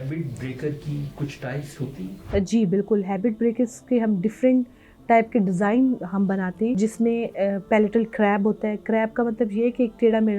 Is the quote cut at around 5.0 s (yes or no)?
no